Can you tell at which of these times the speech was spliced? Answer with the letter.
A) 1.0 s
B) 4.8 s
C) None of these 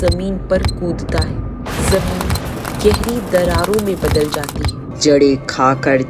B